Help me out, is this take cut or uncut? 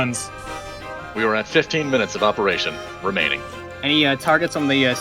cut